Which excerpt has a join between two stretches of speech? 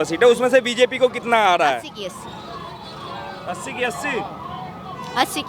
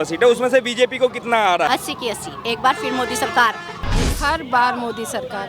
second; 2 cuts; at 1.7 s, 4.1 s

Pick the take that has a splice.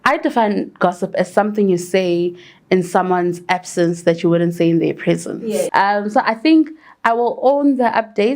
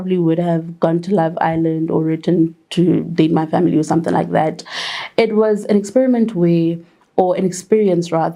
first; 1 cut; at 5.7 s

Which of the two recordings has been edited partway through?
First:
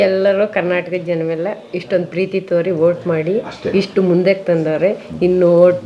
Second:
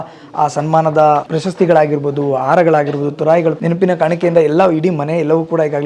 second; 2 cuts; at 1.3 s, 3.6 s

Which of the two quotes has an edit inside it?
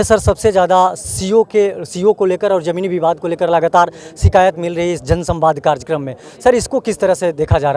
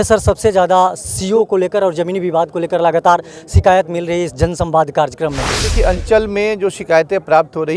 second; 2 cuts; at 1.5 s, 5.6 s

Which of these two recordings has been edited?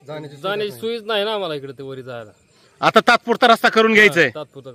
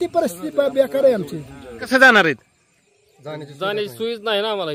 second; 1 cut; at 1.9 s

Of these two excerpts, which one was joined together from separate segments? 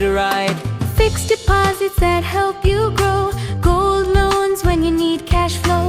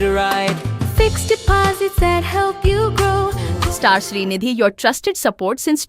second; 1 cut; at 3.5 s

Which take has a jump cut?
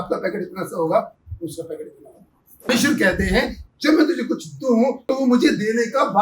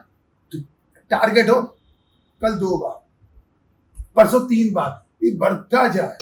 first; 2 cuts; at 2.7 s, 5.0 s

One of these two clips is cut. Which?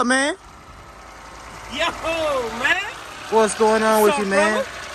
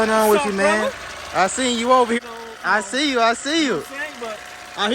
second; 1 cut; at 2.2 s

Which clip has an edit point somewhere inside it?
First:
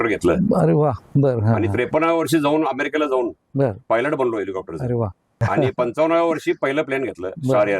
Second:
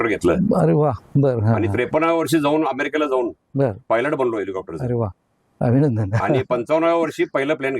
first; 1 cut; at 5.4 s

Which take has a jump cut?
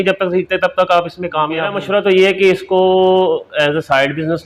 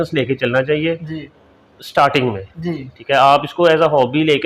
first; 1 cut; at 1.8 s

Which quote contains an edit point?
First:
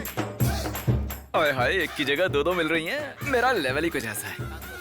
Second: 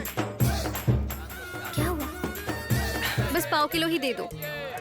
second; 2 cuts; at 1.1 s, 3.2 s

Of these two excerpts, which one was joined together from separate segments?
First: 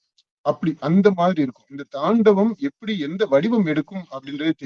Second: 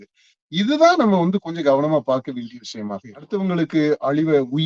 second; 1 cut; at 3.3 s

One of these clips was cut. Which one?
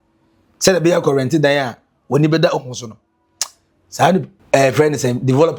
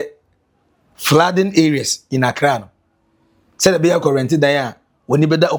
first; 1 cut; at 4.4 s

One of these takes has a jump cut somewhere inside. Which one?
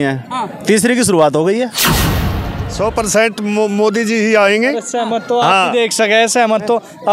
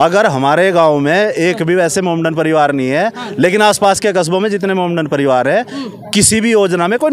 first; 1 cut; at 2.1 s

